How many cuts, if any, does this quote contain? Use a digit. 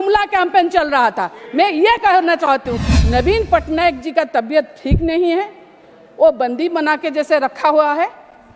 1